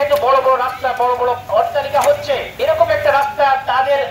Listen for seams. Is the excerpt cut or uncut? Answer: cut